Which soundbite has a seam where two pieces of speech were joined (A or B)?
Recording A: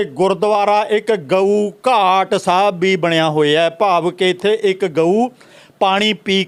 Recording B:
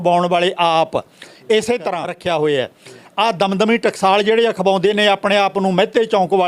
B